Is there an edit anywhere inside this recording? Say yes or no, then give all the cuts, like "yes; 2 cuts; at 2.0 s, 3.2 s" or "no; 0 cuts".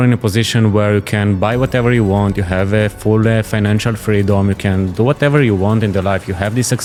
no; 0 cuts